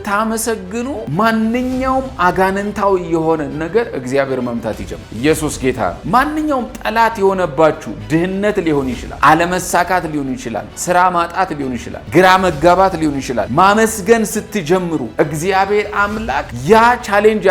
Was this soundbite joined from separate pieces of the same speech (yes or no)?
yes